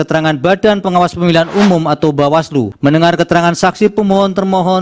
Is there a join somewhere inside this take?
yes; 1 cut; at 2.7 s

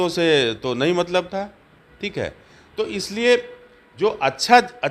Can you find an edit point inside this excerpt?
no; 0 cuts

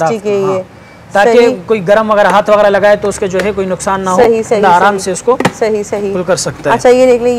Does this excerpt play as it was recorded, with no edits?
yes; 0 cuts

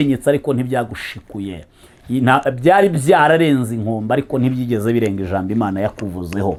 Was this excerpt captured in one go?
yes; 0 cuts

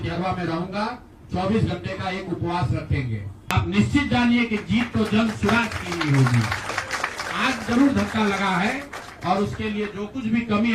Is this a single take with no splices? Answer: no; 1 cut; at 3.5 s

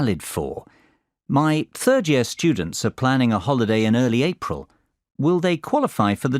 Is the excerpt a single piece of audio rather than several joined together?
no; 1 cut; at 3.4 s

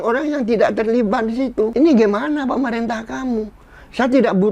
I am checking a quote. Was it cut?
yes; 1 cut; at 1.7 s

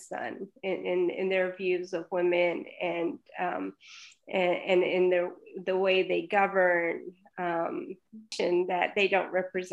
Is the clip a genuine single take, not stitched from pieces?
no; 1 cut; at 8.3 s

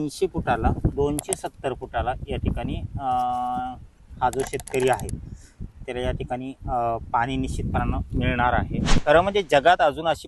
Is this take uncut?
no; 2 cuts; at 0.9 s, 9.0 s

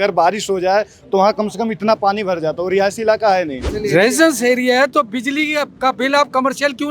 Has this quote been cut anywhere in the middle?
yes; 1 cut; at 3.6 s

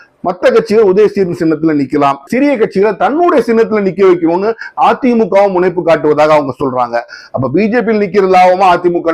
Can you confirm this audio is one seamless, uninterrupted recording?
no; 1 cut; at 2.3 s

